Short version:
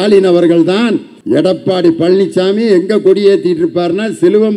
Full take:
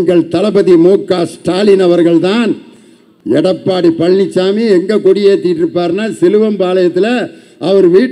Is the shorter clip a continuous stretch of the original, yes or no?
no